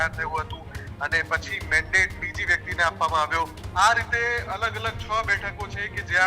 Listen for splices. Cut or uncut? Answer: cut